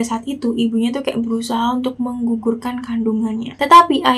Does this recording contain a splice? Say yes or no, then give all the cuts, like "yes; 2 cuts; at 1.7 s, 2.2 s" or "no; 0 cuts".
no; 0 cuts